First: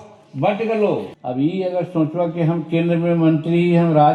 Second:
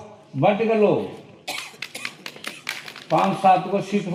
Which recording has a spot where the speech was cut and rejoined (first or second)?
first